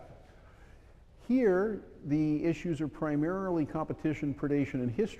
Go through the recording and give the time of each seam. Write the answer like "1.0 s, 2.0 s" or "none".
1.4 s